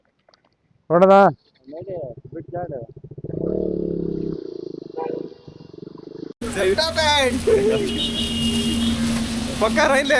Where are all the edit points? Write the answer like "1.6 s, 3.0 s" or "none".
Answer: 6.4 s